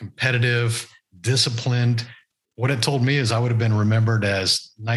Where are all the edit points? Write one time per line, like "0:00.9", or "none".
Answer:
none